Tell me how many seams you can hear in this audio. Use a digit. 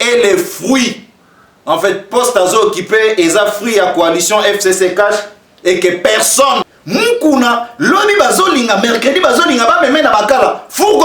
1